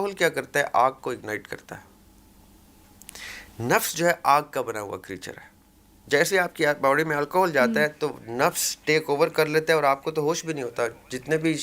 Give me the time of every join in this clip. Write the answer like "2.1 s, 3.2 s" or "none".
none